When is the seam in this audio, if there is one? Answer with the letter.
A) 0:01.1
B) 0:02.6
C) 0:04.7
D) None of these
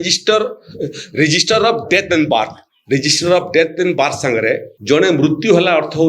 C